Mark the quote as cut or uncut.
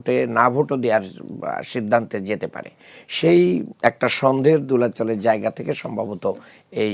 uncut